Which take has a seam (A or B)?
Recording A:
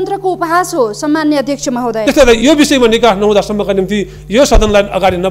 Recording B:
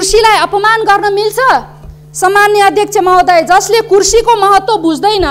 A